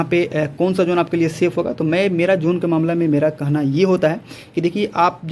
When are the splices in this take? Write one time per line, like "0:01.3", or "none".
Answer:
none